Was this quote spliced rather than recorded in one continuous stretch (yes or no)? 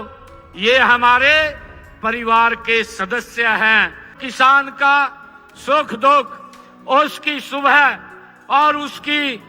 yes